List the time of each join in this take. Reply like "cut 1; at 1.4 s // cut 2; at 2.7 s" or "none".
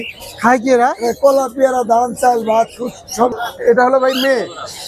cut 1; at 3.4 s